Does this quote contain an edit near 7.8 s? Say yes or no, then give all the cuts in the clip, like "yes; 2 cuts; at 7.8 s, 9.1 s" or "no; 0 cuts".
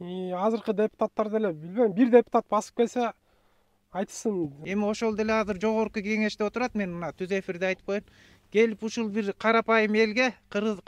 no; 1 cut; at 4.6 s